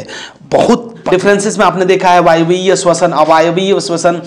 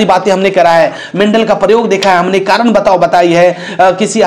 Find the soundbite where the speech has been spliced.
first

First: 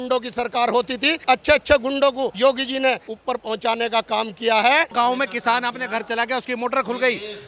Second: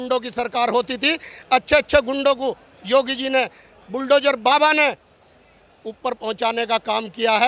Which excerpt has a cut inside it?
first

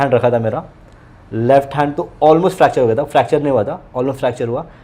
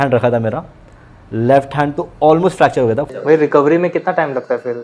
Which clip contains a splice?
second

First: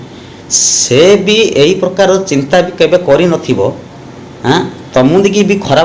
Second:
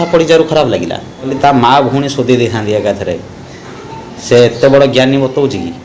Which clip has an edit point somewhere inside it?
second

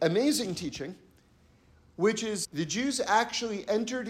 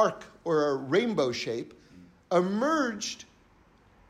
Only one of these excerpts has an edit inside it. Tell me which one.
first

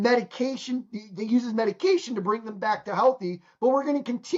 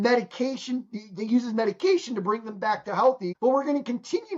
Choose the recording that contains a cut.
second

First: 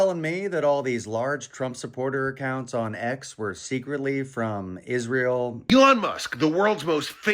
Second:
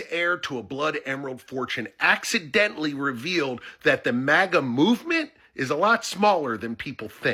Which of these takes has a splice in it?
first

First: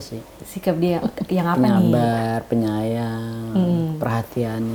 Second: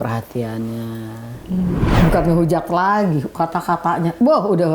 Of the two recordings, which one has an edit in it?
second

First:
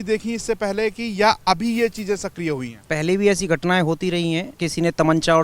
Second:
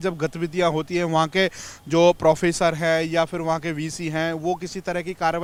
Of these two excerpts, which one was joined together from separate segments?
first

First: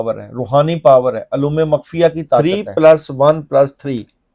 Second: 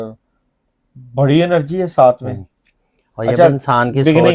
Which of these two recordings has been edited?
first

